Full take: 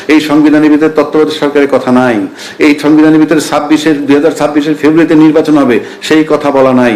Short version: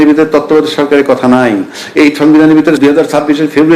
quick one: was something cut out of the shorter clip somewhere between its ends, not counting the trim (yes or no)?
yes